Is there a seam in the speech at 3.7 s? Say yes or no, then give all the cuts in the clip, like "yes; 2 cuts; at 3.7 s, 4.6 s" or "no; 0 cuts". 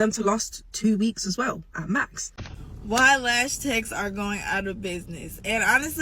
no; 1 cut; at 2.4 s